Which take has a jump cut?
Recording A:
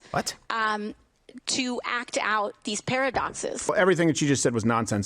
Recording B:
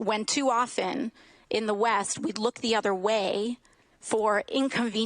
A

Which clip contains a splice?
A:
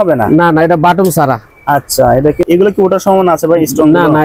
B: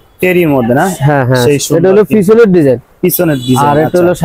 A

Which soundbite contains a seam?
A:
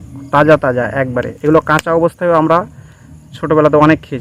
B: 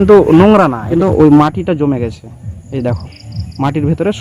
B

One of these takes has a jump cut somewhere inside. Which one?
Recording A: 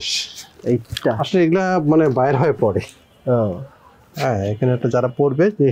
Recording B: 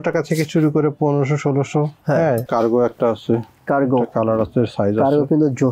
B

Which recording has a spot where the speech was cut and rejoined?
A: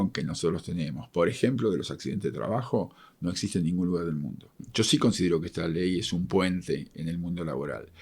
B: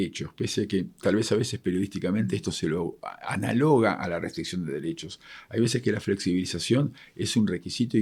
A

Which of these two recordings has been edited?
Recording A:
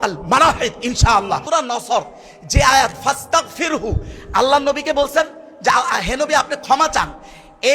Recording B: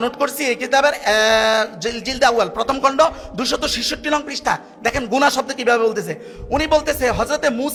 A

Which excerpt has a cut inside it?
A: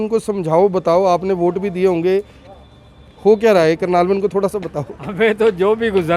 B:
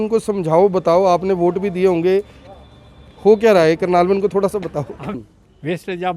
B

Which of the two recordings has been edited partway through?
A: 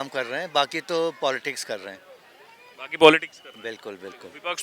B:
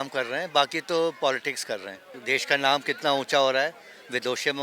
B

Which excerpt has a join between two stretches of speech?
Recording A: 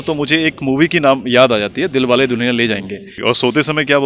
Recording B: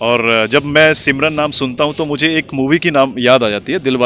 A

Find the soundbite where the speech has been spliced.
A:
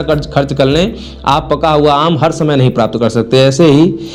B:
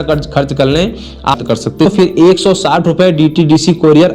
B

